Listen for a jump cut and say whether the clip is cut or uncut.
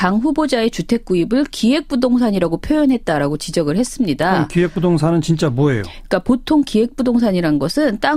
cut